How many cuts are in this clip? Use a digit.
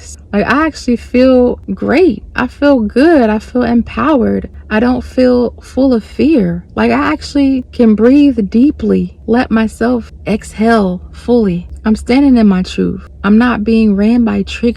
4